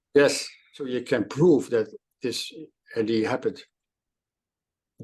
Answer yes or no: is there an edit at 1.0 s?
yes